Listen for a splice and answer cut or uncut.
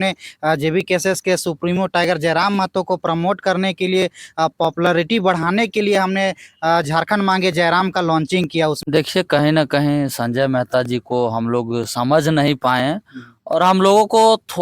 cut